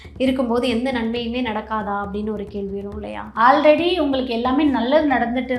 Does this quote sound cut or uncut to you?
cut